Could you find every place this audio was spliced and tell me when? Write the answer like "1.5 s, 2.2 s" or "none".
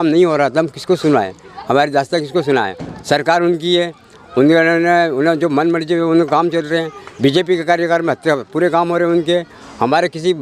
none